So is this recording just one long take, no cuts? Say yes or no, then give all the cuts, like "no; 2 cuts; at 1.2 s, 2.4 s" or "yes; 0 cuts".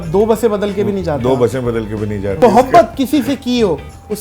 no; 1 cut; at 2.4 s